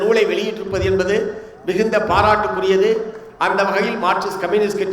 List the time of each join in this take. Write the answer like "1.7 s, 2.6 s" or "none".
none